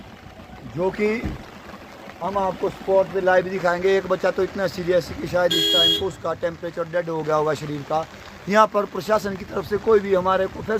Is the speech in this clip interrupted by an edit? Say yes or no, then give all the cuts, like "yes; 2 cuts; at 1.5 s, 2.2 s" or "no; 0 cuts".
no; 0 cuts